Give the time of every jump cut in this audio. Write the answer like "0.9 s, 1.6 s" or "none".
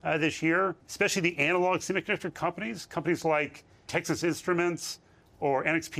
0.8 s, 3.9 s